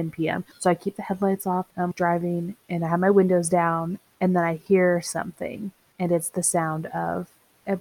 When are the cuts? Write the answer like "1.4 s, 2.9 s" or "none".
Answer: 1.7 s